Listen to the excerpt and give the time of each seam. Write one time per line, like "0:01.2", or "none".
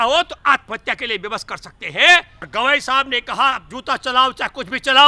0:02.4